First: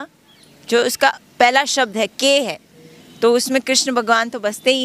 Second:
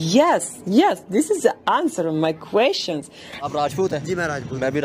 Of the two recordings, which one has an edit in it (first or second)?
second